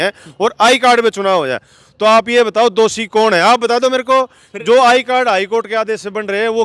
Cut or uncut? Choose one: uncut